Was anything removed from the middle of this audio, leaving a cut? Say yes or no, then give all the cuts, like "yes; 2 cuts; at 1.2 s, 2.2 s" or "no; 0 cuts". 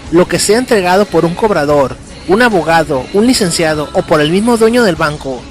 yes; 1 cut; at 1.6 s